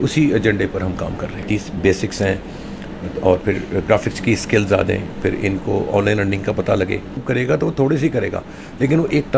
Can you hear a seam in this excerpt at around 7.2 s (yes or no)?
yes